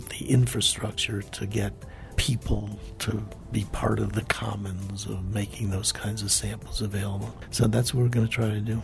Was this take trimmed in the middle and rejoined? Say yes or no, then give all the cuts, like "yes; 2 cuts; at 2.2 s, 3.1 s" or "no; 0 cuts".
yes; 1 cut; at 7.4 s